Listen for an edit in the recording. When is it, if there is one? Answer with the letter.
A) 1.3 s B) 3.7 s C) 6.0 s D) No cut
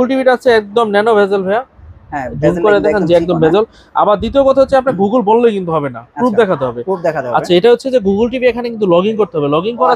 D